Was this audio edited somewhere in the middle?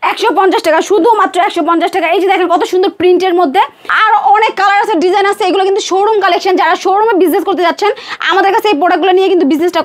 yes; 1 cut; at 3.8 s

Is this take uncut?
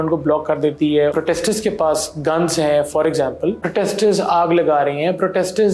no; 2 cuts; at 1.1 s, 3.6 s

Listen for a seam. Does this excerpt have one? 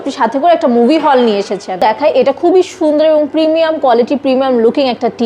yes; 1 cut; at 2.0 s

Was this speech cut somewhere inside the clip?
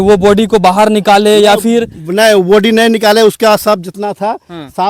no; 0 cuts

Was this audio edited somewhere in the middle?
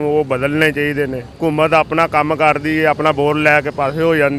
no; 0 cuts

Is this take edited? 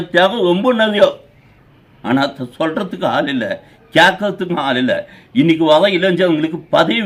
no; 0 cuts

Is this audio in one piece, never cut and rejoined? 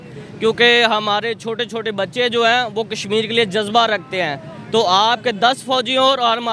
yes; 0 cuts

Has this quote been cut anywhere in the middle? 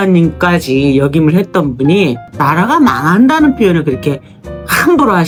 no; 0 cuts

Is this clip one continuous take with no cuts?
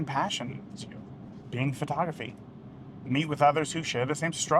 no; 1 cut; at 1.4 s

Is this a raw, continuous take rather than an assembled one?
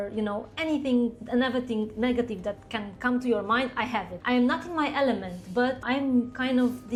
yes; 0 cuts

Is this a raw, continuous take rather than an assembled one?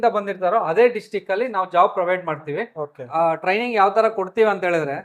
no; 1 cut; at 3.0 s

